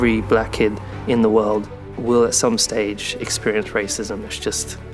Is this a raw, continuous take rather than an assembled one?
yes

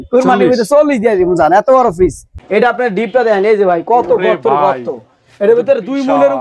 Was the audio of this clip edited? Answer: yes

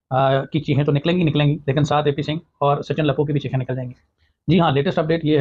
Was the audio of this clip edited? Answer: no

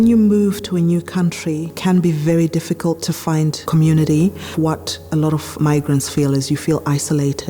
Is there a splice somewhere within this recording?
yes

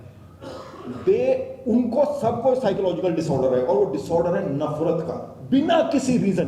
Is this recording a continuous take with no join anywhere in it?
yes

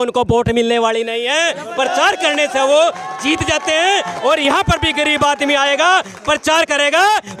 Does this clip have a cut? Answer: no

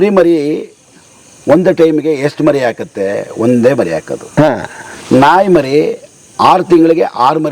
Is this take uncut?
yes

